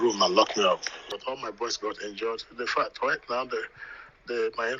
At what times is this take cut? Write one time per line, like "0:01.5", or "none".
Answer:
0:01.0